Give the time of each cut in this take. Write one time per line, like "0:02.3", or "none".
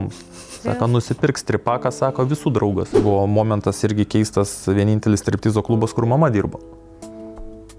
0:02.9